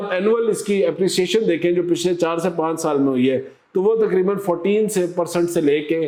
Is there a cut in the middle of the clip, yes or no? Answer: no